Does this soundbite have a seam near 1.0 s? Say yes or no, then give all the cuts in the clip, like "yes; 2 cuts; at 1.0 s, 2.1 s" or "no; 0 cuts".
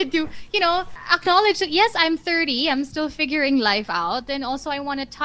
yes; 1 cut; at 1.0 s